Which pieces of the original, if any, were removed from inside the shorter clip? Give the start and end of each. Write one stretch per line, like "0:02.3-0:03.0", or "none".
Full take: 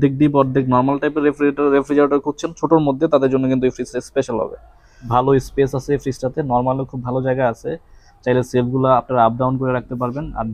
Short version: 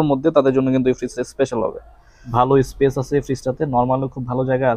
none